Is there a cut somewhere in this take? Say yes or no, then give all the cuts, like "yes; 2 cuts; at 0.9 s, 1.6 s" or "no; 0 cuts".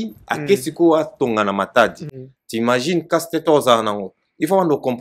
no; 0 cuts